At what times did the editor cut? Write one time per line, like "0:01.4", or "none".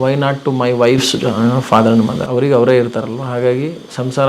0:02.2